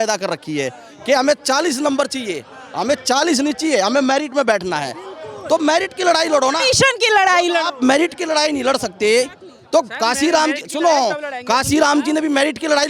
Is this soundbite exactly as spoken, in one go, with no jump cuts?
yes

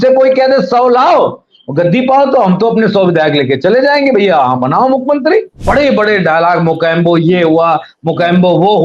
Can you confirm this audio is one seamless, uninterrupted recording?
no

